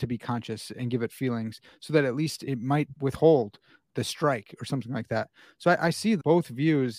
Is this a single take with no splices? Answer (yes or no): no